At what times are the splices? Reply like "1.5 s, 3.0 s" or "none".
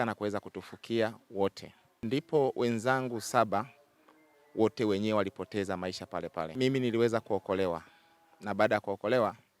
1.9 s, 6.5 s